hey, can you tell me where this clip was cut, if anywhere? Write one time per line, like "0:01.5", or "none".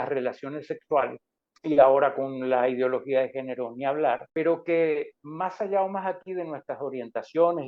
0:04.3